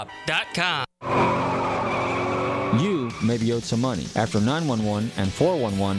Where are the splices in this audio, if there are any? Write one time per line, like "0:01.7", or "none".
0:01.0
0:02.6